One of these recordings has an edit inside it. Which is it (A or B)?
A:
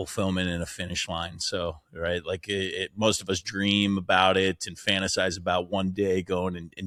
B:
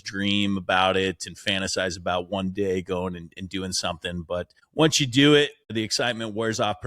B